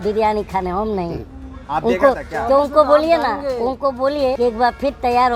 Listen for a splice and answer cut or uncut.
cut